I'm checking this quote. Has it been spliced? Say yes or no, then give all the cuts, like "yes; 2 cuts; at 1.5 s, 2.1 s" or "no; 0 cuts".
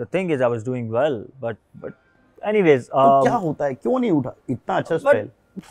no; 0 cuts